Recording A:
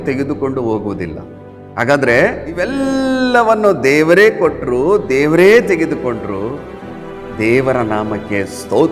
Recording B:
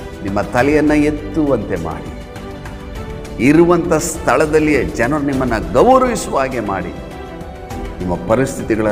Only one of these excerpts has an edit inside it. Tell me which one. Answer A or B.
A